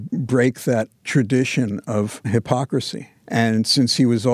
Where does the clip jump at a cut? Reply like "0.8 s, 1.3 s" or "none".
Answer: 2.3 s